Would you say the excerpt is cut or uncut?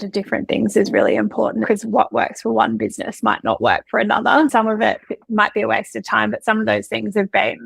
cut